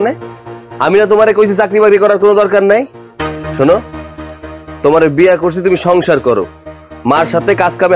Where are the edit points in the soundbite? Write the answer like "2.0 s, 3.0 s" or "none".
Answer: none